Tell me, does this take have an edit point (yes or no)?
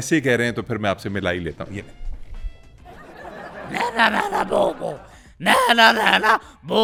no